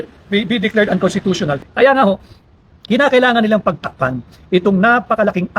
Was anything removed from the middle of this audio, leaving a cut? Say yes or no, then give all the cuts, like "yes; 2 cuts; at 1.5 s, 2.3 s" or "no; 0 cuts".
yes; 1 cut; at 1.6 s